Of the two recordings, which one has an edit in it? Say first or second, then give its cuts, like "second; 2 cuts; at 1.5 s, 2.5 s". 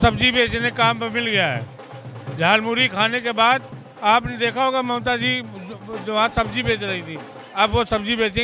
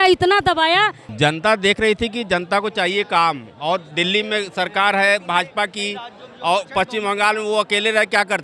second; 1 cut; at 1.0 s